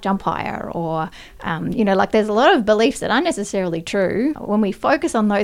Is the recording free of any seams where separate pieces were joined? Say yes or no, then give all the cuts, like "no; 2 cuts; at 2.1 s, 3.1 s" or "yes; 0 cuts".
no; 1 cut; at 4.4 s